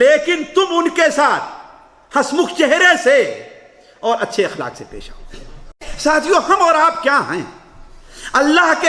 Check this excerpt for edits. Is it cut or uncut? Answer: cut